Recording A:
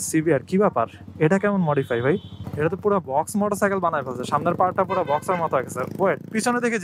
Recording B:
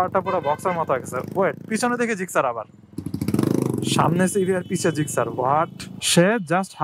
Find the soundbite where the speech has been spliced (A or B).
B